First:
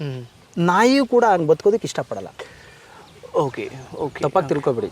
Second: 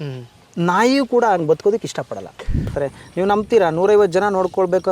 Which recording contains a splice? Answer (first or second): second